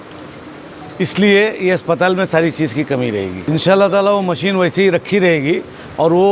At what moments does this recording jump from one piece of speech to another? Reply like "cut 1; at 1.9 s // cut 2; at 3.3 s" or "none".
cut 1; at 3.5 s